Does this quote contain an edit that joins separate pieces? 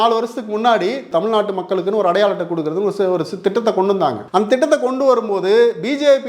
yes; 2 cuts; at 1.0 s, 4.2 s

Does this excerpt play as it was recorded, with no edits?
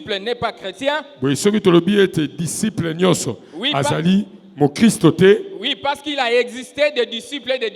yes; 0 cuts

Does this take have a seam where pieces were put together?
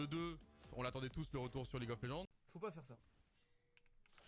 yes; 1 cut; at 2.4 s

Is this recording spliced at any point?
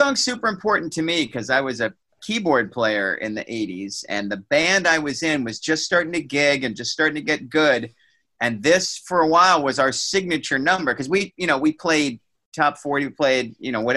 no; 0 cuts

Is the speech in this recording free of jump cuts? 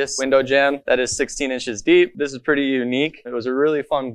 no; 1 cut; at 2.2 s

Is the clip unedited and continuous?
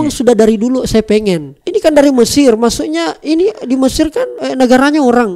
no; 2 cuts; at 1.5 s, 4.4 s

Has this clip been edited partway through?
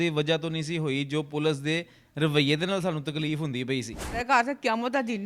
yes; 1 cut; at 4.2 s

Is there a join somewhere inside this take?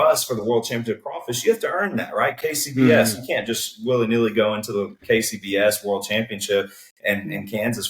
no; 0 cuts

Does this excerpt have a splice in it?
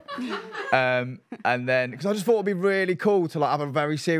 no; 0 cuts

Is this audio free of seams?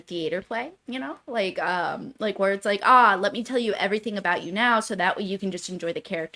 yes; 0 cuts

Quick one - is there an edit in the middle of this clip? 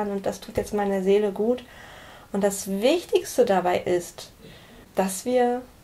yes; 1 cut; at 4.8 s

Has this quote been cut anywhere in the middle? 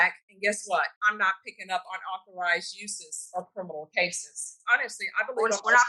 yes; 2 cuts; at 1.0 s, 4.5 s

